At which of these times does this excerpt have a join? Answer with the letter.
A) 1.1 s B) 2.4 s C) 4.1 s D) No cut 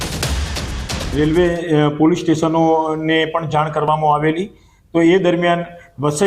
A